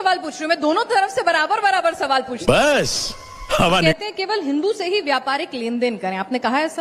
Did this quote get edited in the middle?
yes; 2 cuts; at 2.3 s, 3.8 s

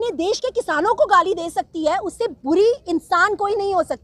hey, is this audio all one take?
yes; 0 cuts

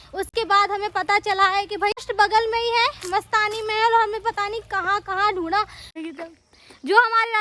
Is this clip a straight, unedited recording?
no; 2 cuts; at 2.1 s, 5.9 s

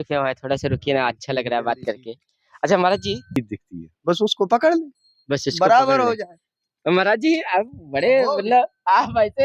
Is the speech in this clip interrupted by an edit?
yes; 1 cut; at 3.4 s

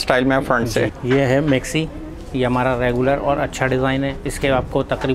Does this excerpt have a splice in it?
yes; 1 cut; at 1.0 s

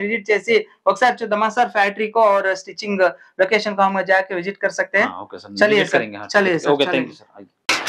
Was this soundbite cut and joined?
no; 0 cuts

